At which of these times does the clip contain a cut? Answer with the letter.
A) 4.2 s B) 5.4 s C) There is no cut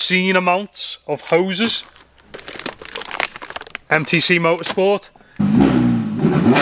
B